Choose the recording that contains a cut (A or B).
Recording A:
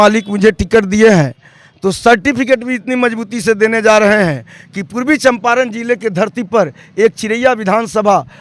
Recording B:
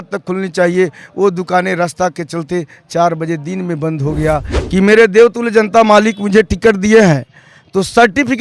B